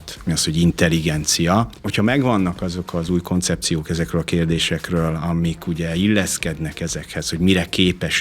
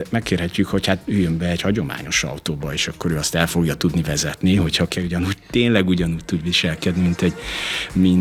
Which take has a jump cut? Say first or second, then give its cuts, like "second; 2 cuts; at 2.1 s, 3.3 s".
first; 1 cut; at 1.8 s